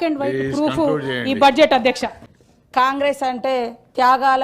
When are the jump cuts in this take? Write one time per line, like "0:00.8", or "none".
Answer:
0:02.4